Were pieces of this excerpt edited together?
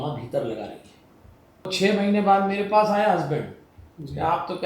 yes; 1 cut; at 1.7 s

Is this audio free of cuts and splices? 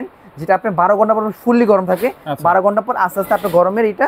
yes; 0 cuts

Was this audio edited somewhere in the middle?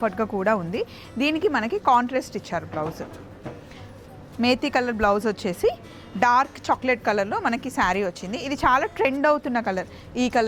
no; 0 cuts

